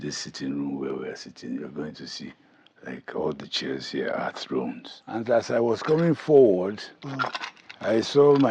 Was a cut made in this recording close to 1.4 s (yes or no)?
no